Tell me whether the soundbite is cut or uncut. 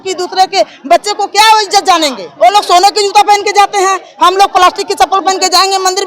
cut